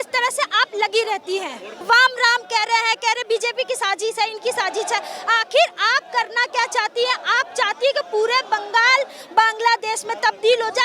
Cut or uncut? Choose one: cut